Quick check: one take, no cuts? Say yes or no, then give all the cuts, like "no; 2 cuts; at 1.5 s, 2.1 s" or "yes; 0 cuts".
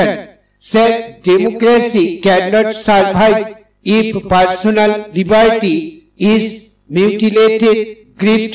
yes; 0 cuts